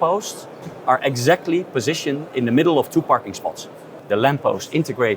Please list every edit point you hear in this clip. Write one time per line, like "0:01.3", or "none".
0:03.9